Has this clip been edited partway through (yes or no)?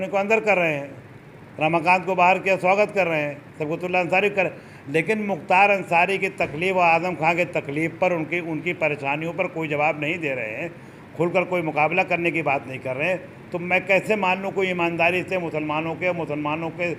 no